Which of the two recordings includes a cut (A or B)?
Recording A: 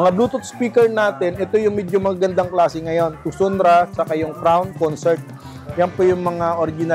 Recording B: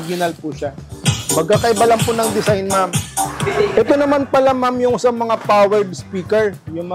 B